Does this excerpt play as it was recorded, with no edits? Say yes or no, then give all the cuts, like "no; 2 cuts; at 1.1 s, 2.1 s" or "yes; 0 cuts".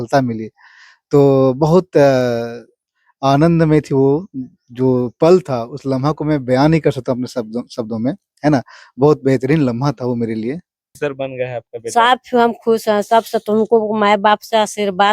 no; 1 cut; at 10.9 s